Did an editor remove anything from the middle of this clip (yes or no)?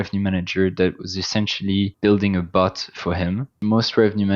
yes